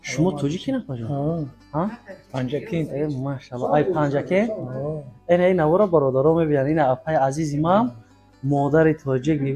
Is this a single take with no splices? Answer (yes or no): yes